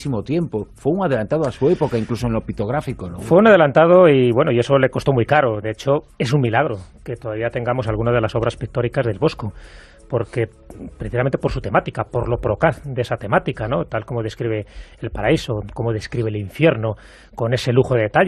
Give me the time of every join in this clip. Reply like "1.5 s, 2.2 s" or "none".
14.4 s